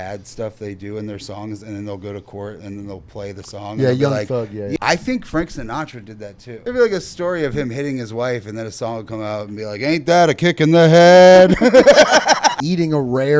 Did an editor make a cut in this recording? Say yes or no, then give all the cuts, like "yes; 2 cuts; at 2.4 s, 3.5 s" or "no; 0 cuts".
yes; 3 cuts; at 4.8 s, 6.5 s, 12.5 s